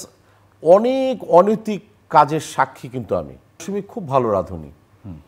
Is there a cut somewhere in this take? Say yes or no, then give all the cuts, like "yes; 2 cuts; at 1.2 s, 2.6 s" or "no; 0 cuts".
yes; 1 cut; at 3.7 s